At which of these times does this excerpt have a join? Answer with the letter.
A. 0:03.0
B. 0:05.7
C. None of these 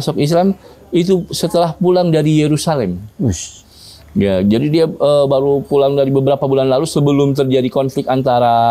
C